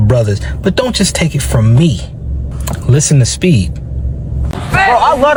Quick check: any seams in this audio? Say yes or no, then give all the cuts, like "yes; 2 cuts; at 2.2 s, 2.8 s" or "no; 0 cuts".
no; 0 cuts